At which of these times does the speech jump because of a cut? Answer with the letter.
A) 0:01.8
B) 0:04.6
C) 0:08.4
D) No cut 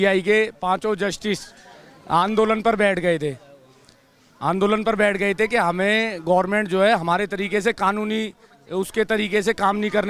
D